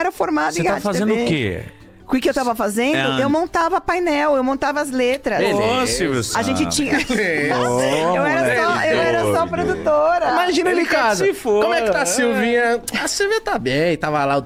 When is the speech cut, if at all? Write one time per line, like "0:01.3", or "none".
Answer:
none

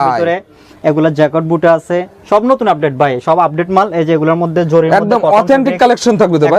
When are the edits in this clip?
none

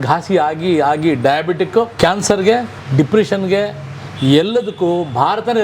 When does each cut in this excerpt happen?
0:01.9
0:02.8

